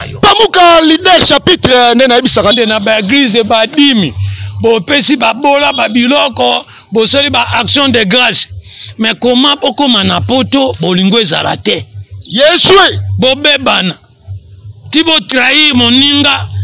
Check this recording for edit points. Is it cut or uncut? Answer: cut